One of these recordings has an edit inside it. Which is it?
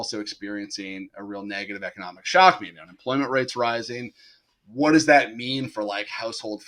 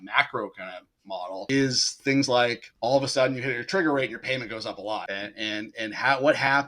second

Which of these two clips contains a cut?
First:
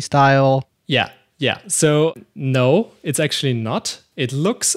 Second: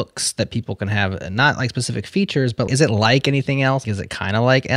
second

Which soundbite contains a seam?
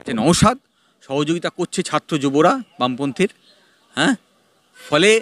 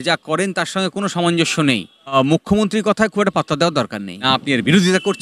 second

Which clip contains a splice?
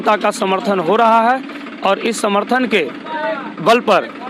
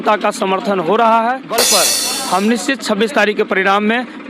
second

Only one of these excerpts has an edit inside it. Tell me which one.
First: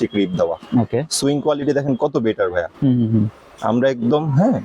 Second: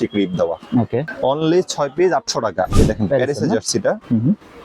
second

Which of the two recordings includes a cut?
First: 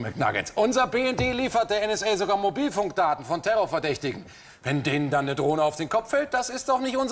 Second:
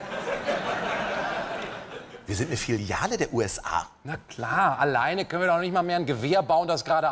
first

